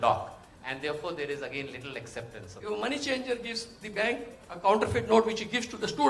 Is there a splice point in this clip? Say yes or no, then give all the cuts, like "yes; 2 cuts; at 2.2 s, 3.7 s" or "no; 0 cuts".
yes; 1 cut; at 2.6 s